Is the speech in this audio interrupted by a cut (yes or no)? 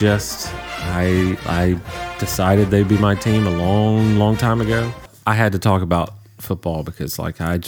yes